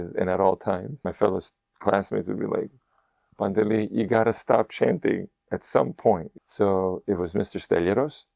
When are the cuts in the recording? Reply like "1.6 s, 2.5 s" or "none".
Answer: 1.1 s, 6.3 s